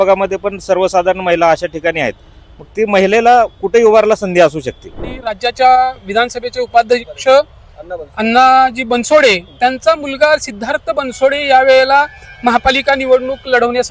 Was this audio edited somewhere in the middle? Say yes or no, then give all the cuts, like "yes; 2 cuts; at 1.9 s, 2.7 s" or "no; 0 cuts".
yes; 1 cut; at 5.1 s